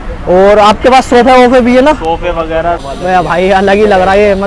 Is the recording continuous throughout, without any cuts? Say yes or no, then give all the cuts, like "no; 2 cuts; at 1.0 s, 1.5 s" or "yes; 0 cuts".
no; 1 cut; at 2.8 s